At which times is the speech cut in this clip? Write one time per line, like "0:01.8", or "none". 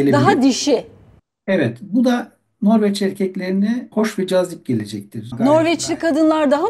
0:03.9
0:05.2